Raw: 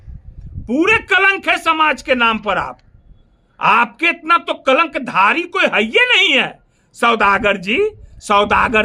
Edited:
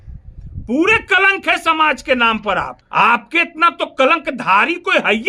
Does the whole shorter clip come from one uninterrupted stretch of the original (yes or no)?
no